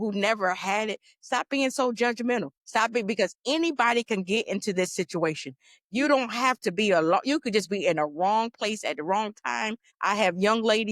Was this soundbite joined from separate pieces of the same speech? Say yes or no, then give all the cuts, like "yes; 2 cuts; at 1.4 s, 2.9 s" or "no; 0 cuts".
yes; 2 cuts; at 2.6 s, 9.9 s